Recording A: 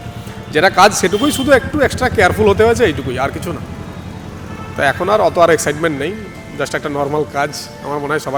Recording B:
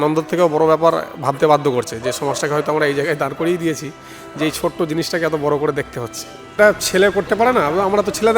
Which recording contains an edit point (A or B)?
B